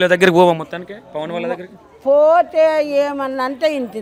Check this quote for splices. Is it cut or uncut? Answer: uncut